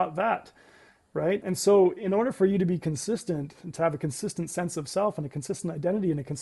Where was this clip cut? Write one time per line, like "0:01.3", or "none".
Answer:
0:01.4